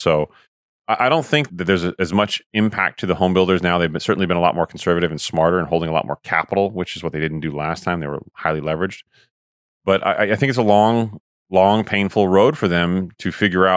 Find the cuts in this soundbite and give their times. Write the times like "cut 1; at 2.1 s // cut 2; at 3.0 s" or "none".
cut 1; at 1.5 s

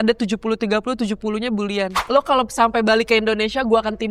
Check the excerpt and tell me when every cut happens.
cut 1; at 2.0 s

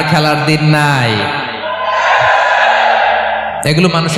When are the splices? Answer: none

